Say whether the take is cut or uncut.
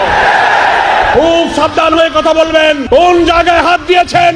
cut